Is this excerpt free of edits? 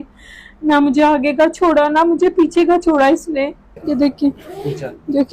no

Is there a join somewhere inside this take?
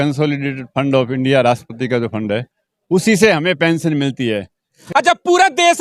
yes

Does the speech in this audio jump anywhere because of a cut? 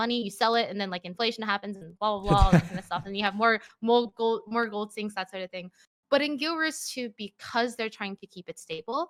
no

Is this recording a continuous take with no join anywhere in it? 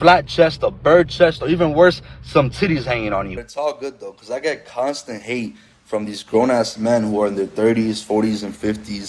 no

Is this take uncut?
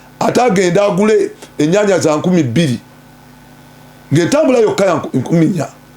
yes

